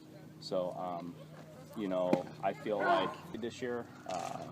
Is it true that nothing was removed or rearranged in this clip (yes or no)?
no